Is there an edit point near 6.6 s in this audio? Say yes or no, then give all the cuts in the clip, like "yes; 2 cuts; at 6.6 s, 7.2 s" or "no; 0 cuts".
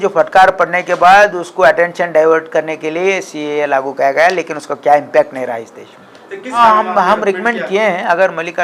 yes; 1 cut; at 6.6 s